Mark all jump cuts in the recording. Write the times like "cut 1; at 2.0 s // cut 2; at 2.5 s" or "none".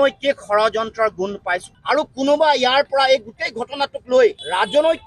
none